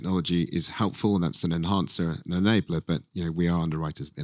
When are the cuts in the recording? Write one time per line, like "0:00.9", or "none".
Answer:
none